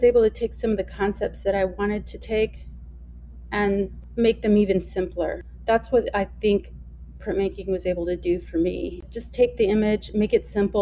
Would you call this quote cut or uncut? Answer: cut